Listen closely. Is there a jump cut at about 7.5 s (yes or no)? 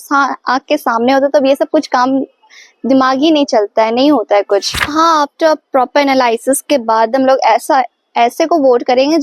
no